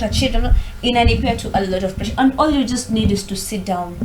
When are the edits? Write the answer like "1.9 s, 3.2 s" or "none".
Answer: none

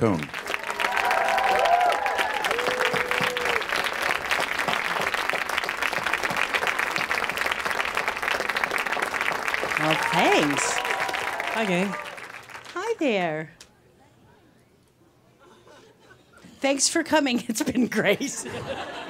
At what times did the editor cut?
none

